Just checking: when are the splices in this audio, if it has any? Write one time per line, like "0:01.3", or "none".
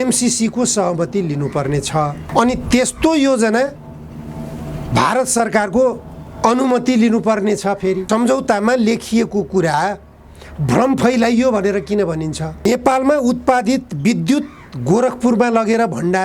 0:02.2
0:08.0
0:12.6

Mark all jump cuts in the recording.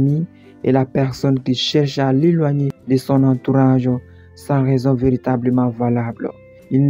none

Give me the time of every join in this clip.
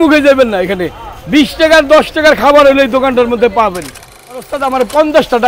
0:04.3

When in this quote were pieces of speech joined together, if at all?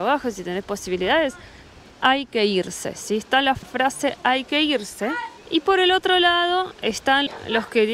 none

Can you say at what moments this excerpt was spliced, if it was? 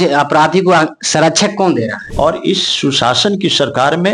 0:02.0

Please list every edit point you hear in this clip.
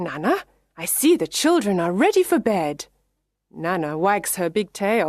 none

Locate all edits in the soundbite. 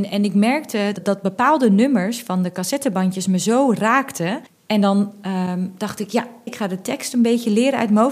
0:01.0
0:04.5
0:06.5

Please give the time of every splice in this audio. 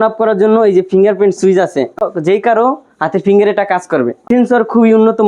0:02.0
0:04.2

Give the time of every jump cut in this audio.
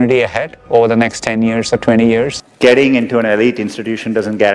0:02.4

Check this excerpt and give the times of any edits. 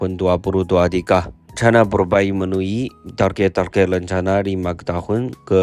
0:01.4

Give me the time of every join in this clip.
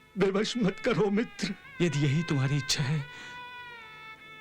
0:01.6

